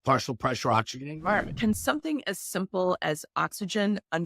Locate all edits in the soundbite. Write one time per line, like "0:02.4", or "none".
0:01.5